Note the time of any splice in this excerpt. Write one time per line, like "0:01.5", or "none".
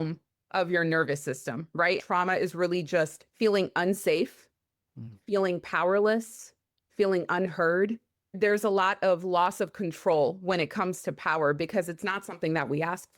0:02.0
0:08.3